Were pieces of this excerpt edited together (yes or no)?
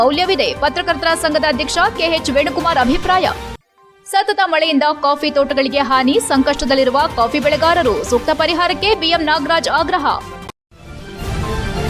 yes